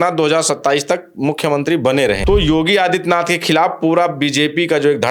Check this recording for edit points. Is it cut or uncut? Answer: cut